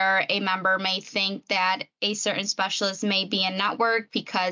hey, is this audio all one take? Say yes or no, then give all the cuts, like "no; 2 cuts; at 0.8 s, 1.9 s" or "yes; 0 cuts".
yes; 0 cuts